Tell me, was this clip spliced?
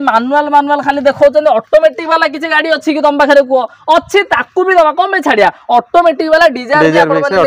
no; 0 cuts

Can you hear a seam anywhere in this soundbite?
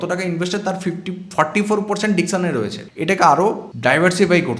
yes; 2 cuts; at 2.8 s, 3.7 s

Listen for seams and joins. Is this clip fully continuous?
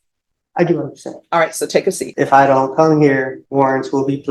no; 2 cuts; at 2.1 s, 3.4 s

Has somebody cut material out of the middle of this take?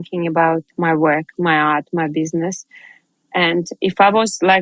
no; 0 cuts

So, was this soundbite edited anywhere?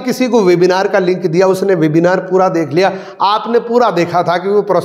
no; 0 cuts

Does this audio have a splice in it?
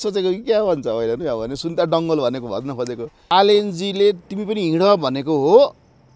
yes; 1 cut; at 3.3 s

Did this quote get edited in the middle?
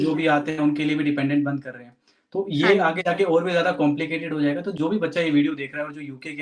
no; 0 cuts

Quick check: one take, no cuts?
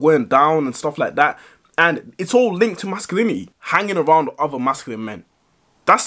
yes; 0 cuts

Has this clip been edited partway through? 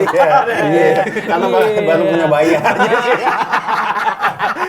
no; 0 cuts

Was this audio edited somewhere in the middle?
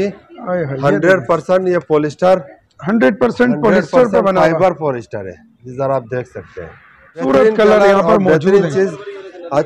yes; 1 cut; at 7.1 s

